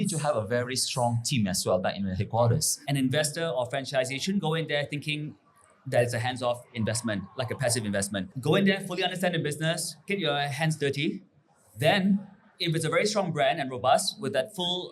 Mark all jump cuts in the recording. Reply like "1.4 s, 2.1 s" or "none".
2.7 s, 10.0 s